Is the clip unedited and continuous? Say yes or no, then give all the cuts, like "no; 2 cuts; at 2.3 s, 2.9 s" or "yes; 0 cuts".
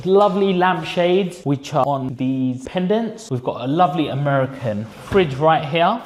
yes; 0 cuts